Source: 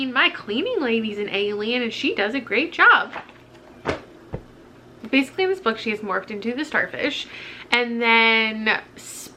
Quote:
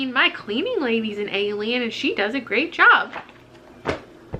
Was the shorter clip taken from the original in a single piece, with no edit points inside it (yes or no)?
yes